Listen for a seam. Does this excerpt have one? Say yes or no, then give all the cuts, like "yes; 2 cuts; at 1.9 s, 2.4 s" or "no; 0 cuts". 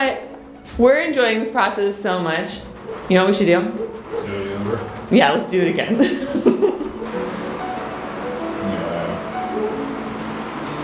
no; 0 cuts